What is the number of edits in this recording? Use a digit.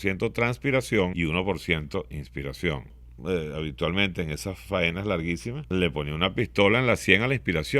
3